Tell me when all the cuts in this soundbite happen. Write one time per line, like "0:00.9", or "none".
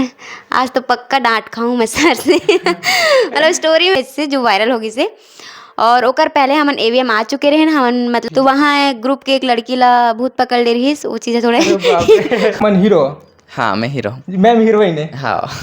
0:04.0
0:08.2
0:12.6